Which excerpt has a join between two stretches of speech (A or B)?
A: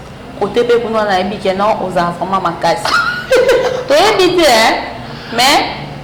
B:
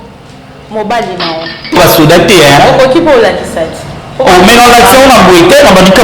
B